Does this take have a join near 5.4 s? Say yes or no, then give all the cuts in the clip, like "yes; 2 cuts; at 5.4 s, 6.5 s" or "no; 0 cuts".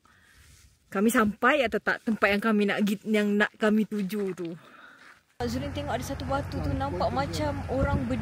yes; 1 cut; at 5.4 s